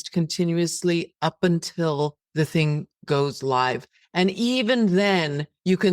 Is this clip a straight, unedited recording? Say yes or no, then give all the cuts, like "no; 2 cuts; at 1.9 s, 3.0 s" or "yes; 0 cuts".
no; 1 cut; at 2.2 s